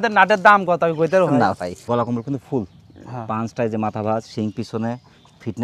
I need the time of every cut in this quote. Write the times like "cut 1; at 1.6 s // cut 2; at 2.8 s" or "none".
cut 1; at 1.7 s